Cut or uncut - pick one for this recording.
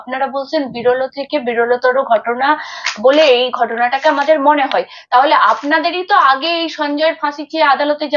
uncut